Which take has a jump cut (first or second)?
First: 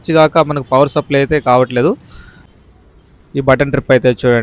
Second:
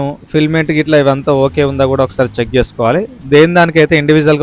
first